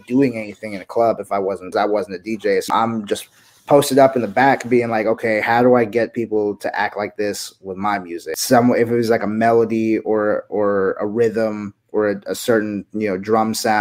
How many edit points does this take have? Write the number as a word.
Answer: three